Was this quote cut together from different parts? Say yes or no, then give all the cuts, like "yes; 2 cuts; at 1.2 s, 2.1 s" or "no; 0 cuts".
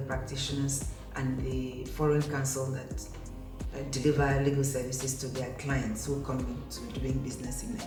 no; 0 cuts